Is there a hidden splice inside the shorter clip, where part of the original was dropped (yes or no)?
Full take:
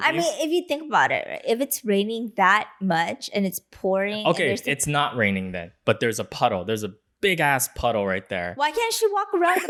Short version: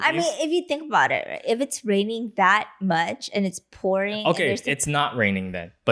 no